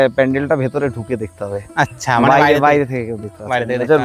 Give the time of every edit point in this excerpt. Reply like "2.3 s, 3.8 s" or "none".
none